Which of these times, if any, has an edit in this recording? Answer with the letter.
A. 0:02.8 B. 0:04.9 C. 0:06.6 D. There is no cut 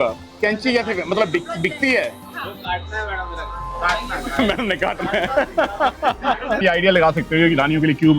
C